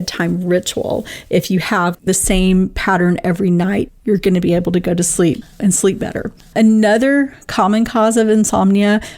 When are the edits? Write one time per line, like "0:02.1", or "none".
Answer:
0:02.0
0:05.5

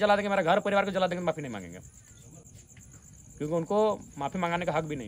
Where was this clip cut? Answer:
none

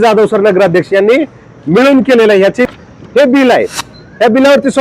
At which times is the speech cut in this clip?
0:02.7

